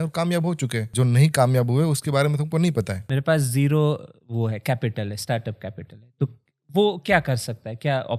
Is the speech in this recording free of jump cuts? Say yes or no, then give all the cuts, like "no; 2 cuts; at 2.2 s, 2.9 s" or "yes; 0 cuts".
no; 2 cuts; at 0.9 s, 3.0 s